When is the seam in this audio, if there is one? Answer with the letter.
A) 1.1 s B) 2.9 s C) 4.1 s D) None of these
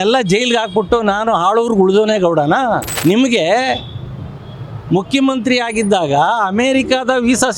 B